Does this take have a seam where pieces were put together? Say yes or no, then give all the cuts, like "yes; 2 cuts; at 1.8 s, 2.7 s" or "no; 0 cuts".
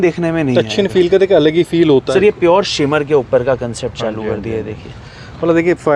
yes; 1 cut; at 2.1 s